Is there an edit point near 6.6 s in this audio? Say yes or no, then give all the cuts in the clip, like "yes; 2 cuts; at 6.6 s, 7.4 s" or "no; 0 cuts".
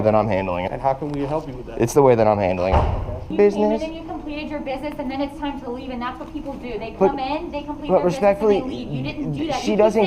no; 1 cut; at 3.3 s